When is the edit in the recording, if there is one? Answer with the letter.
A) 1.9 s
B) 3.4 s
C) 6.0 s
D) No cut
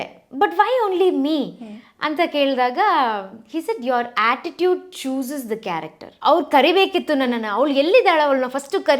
C